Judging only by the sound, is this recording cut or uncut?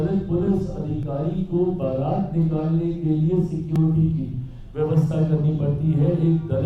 uncut